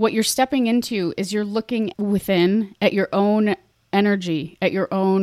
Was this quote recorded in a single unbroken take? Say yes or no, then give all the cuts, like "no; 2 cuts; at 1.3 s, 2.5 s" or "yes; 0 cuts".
no; 1 cut; at 1.9 s